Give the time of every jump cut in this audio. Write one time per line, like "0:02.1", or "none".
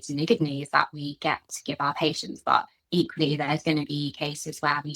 none